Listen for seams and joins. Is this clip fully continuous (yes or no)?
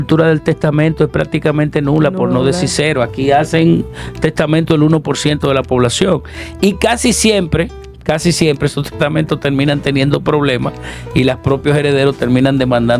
yes